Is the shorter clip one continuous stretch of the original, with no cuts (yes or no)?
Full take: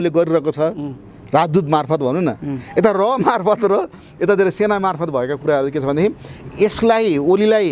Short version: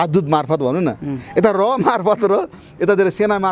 yes